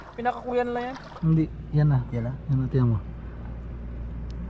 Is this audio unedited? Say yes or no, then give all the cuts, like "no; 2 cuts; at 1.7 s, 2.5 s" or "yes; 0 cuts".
no; 1 cut; at 1.2 s